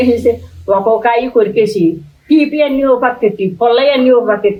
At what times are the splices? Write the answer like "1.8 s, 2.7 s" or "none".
none